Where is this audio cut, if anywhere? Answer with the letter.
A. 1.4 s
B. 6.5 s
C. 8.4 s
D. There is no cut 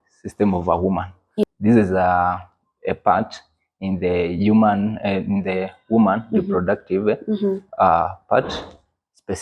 A